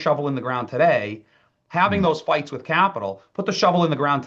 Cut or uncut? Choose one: uncut